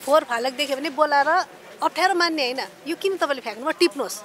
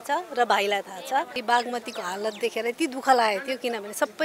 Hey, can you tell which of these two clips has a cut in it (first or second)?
second